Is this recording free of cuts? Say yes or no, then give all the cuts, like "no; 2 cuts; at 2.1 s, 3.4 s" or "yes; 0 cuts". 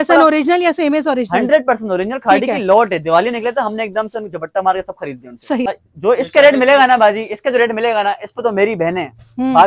no; 1 cut; at 5.7 s